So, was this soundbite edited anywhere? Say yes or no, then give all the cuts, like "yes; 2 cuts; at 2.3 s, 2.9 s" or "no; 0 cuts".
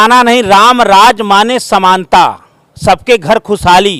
no; 0 cuts